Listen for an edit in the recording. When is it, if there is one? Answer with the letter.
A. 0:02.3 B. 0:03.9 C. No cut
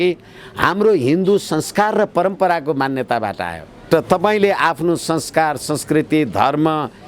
B